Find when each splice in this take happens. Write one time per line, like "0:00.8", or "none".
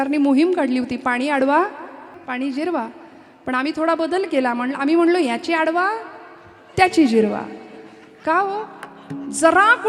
0:02.1